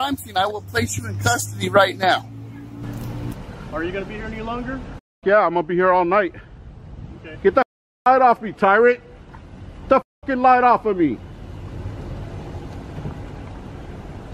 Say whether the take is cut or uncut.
cut